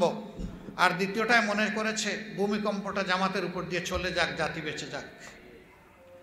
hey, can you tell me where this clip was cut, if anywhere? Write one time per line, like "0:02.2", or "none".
none